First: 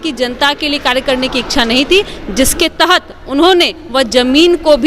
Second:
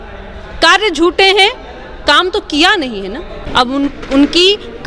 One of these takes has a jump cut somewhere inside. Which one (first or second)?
second